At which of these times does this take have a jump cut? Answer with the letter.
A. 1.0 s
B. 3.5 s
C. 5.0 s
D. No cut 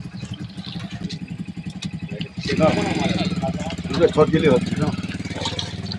A